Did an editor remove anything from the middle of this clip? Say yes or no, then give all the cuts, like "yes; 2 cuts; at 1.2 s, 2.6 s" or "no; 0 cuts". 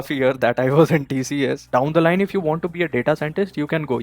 yes; 1 cut; at 1.6 s